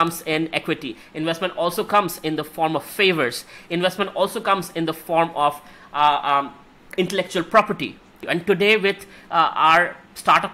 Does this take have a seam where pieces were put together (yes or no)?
no